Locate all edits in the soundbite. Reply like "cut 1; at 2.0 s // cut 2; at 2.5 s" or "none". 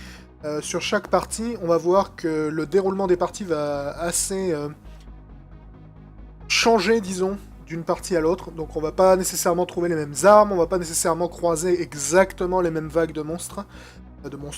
cut 1; at 12.9 s